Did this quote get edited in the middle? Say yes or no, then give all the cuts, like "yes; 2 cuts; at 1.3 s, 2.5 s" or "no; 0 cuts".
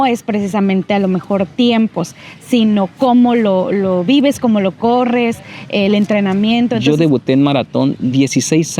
yes; 1 cut; at 6.8 s